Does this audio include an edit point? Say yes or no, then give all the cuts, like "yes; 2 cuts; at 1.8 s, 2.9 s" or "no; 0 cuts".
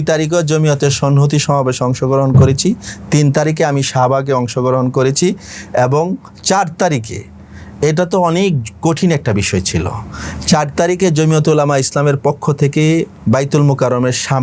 no; 0 cuts